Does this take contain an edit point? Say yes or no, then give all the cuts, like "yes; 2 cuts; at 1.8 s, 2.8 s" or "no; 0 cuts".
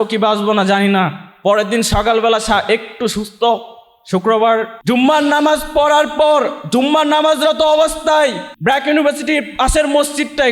yes; 2 cuts; at 4.7 s, 8.5 s